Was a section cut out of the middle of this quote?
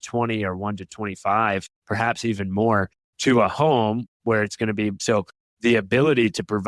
yes; 1 cut; at 5.0 s

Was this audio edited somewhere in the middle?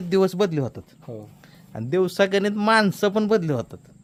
no; 0 cuts

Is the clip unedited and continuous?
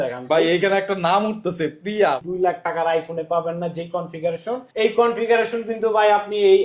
no; 2 cuts; at 2.2 s, 4.7 s

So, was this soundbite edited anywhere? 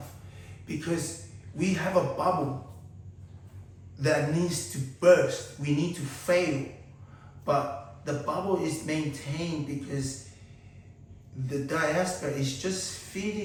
no; 0 cuts

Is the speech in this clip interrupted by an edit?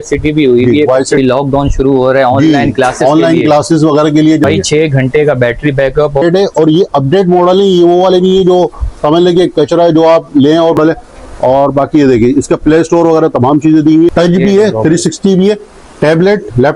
yes; 5 cuts; at 1.2 s, 4.4 s, 6.2 s, 10.8 s, 14.1 s

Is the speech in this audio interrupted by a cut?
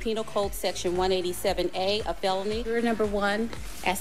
no; 0 cuts

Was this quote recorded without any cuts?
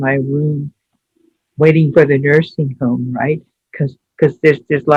yes; 0 cuts

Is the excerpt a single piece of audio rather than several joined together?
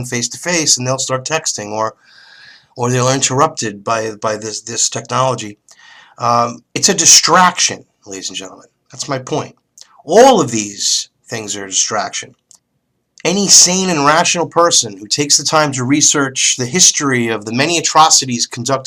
yes; 0 cuts

